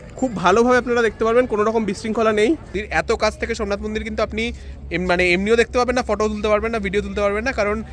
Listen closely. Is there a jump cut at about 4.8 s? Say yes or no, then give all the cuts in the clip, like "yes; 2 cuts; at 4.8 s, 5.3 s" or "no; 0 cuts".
no; 1 cut; at 2.8 s